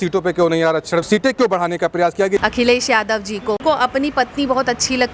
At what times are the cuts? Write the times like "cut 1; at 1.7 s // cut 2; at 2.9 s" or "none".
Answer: cut 1; at 2.4 s // cut 2; at 3.6 s